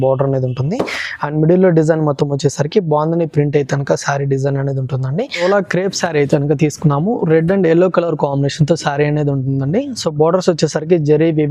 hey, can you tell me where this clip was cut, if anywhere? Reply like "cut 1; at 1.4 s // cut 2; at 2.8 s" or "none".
cut 1; at 5.4 s